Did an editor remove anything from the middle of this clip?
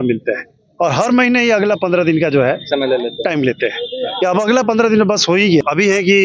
no; 0 cuts

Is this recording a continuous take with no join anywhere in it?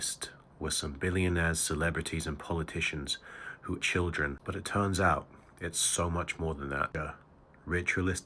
no; 2 cuts; at 3.8 s, 6.9 s

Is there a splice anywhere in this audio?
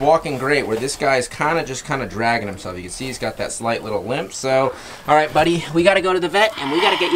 no; 0 cuts

